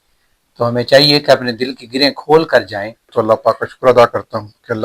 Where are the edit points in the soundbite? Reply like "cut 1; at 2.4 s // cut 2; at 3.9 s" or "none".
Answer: cut 1; at 3.1 s

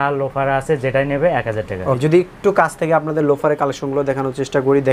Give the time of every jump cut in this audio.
cut 1; at 2.0 s

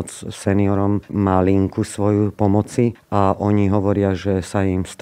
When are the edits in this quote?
cut 1; at 1.1 s // cut 2; at 2.5 s

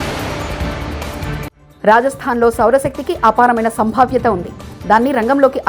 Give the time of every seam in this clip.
cut 1; at 1.6 s

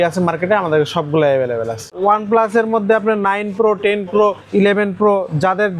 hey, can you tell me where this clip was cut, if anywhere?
cut 1; at 1.9 s // cut 2; at 4.4 s

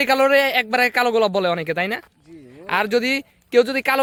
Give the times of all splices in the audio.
none

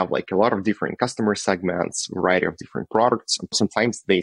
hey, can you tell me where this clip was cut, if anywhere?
none

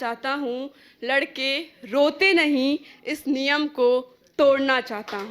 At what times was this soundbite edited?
none

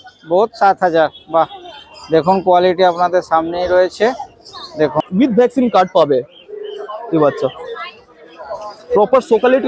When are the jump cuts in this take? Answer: cut 1; at 5.1 s

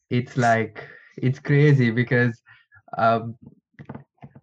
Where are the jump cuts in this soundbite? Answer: none

